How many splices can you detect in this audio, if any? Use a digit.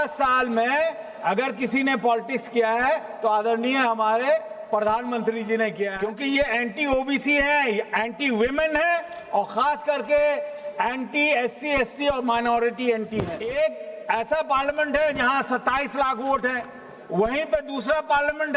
2